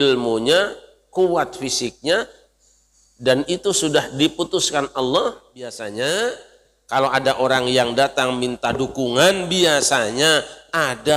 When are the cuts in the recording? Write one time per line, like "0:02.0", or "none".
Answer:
0:05.8